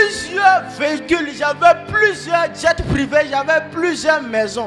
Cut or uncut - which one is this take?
uncut